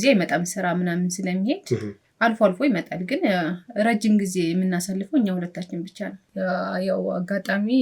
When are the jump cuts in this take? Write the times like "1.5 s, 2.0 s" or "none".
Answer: 6.2 s